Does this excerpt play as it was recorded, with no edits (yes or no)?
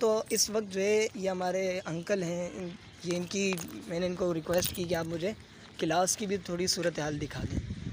yes